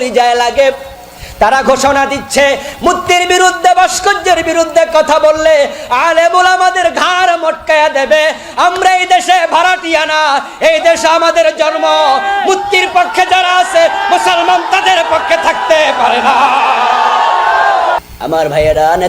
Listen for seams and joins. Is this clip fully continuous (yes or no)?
yes